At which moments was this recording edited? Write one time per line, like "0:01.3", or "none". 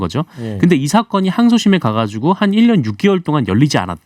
none

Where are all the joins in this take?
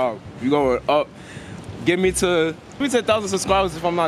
0:02.8

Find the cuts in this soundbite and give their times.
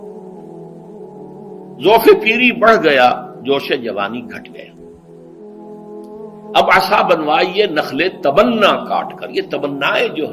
0:00.9

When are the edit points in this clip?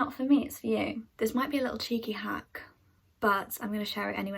0:01.0

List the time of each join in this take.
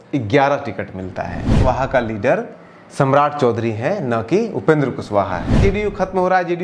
0:01.5
0:05.6

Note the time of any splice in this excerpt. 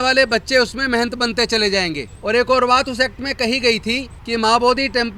0:02.1
0:04.1

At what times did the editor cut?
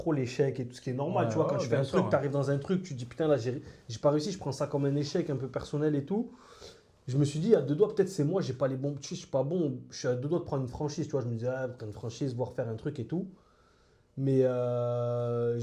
none

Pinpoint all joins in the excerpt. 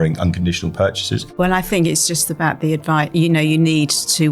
0:01.3

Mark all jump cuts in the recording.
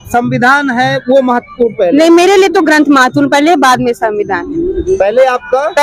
none

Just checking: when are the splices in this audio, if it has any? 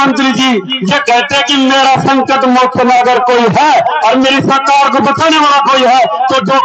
none

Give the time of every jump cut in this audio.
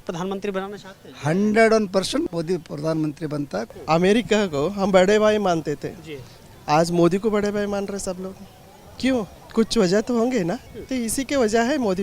0:02.2
0:03.7
0:09.4
0:10.7

